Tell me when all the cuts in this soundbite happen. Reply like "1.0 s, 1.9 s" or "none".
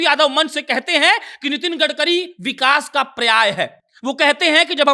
none